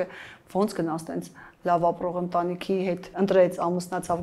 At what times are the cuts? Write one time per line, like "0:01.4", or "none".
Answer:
0:03.1